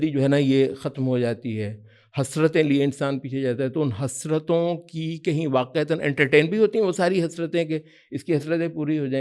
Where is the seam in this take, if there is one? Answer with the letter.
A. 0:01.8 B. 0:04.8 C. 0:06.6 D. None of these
D